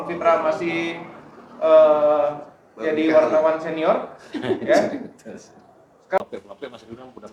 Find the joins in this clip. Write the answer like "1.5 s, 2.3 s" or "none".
6.2 s